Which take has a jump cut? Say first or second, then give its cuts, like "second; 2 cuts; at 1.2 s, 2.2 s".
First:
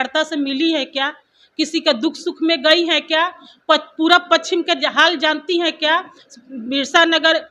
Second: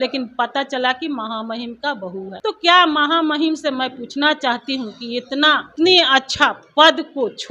second; 2 cuts; at 2.3 s, 5.7 s